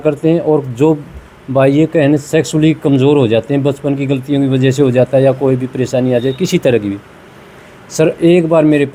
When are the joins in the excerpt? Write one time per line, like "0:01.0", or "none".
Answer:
none